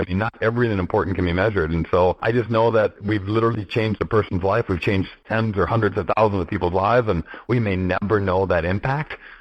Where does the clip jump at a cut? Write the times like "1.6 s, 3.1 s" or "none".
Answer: 2.2 s, 3.0 s, 5.2 s